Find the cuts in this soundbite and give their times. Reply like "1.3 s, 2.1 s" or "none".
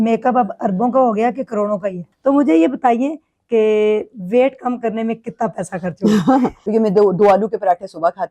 2.0 s, 6.6 s